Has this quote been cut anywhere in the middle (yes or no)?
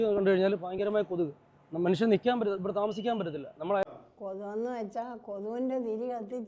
yes